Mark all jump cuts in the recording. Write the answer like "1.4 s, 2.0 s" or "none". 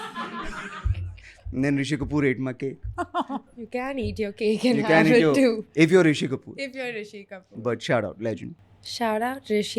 3.6 s, 8.6 s